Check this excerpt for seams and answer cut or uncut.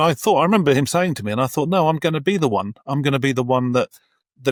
uncut